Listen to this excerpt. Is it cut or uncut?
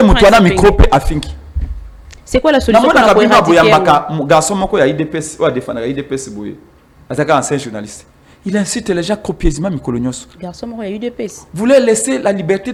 uncut